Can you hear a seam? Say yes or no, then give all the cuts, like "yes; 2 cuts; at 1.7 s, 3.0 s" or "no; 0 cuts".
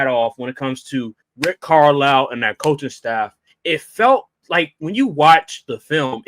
yes; 2 cuts; at 1.2 s, 3.5 s